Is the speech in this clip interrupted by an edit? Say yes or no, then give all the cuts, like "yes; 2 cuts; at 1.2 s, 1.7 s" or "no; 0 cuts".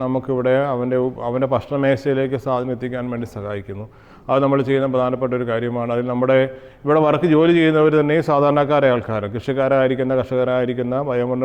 no; 0 cuts